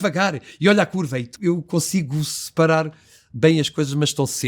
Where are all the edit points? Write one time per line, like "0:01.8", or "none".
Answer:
0:01.3